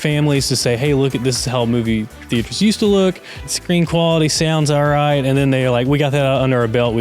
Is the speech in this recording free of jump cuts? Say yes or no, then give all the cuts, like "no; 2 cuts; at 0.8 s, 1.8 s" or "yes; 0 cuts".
no; 1 cut; at 3.3 s